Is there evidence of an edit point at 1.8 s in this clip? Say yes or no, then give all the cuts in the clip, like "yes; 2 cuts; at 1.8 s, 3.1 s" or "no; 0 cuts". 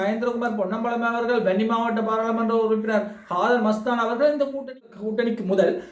no; 1 cut; at 4.8 s